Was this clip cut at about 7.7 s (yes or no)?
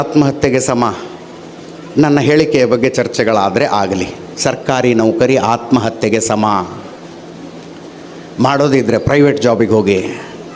no